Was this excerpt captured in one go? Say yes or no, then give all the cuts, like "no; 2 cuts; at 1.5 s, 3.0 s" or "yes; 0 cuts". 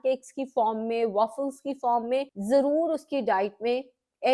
no; 1 cut; at 2.3 s